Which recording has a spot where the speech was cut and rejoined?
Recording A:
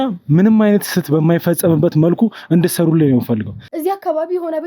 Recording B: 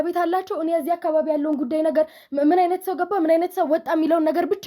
A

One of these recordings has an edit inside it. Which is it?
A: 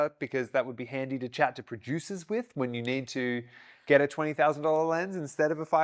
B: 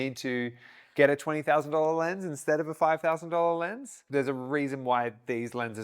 B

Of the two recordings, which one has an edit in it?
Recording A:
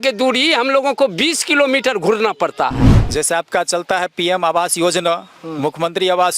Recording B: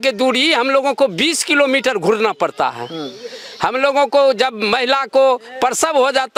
A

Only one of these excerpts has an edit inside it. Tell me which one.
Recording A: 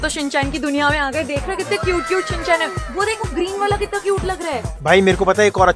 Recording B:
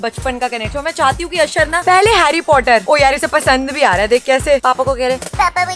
B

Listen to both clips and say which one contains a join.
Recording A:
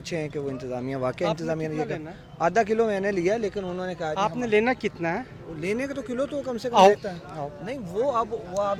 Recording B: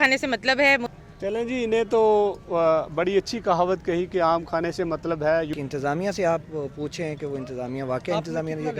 B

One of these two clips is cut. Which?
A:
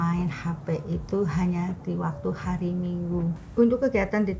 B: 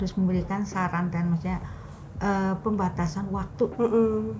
A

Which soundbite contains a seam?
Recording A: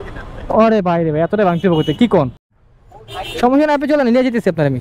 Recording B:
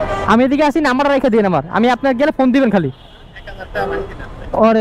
A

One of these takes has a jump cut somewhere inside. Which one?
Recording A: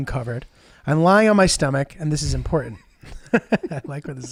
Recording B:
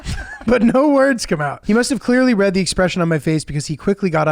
B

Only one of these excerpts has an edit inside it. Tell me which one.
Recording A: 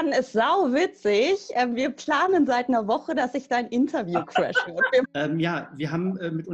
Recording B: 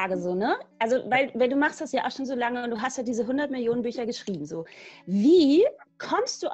A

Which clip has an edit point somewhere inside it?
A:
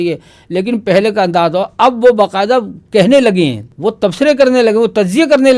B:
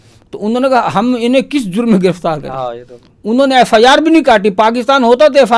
A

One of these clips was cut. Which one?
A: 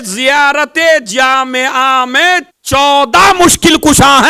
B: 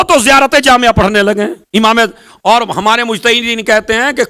B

